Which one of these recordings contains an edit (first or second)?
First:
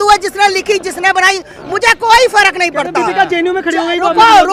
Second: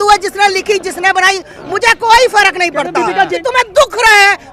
second